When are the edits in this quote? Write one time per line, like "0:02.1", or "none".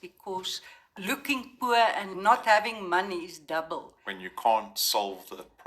0:00.9
0:02.1
0:04.0